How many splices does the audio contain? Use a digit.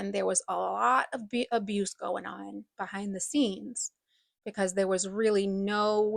0